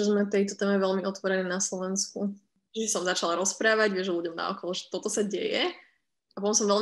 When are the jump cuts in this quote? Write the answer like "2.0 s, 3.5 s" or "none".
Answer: 2.6 s